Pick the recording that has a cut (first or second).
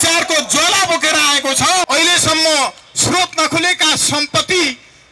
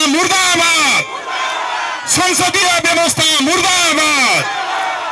first